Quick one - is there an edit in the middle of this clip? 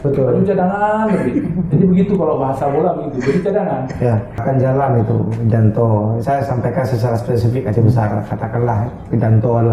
yes; 1 cut; at 4.4 s

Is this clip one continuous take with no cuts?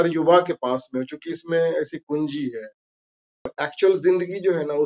no; 1 cut; at 3.5 s

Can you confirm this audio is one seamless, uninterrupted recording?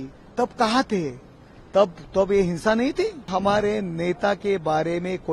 no; 1 cut; at 3.3 s

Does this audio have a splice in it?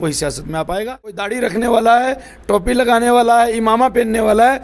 yes; 1 cut; at 1.3 s

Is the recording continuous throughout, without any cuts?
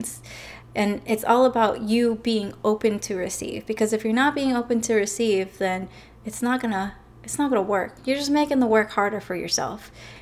yes; 0 cuts

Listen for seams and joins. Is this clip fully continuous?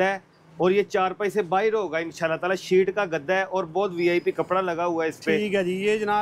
yes; 0 cuts

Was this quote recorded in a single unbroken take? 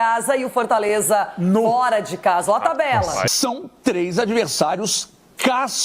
no; 1 cut; at 3.3 s

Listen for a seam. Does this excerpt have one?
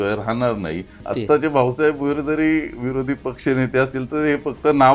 yes; 1 cut; at 1.0 s

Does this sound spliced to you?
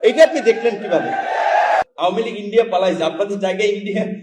yes; 1 cut; at 1.8 s

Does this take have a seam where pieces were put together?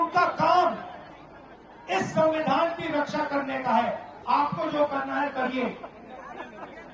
yes; 1 cut; at 4.1 s

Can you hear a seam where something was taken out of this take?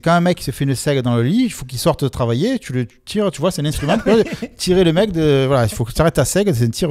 no; 0 cuts

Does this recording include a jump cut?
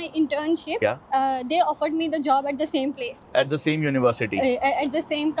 no; 0 cuts

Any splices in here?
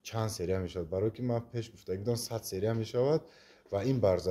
no; 0 cuts

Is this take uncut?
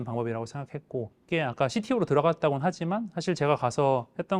no; 1 cut; at 1.2 s

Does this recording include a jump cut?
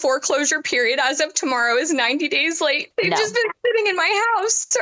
yes; 1 cut; at 2.8 s

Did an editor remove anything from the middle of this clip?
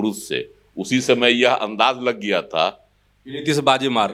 no; 0 cuts

